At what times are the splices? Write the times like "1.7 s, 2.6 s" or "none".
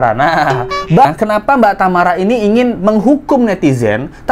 1.1 s